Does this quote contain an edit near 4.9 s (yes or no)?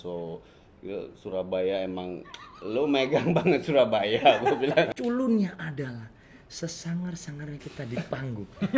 yes